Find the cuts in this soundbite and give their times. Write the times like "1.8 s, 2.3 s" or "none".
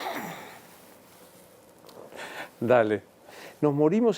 3.1 s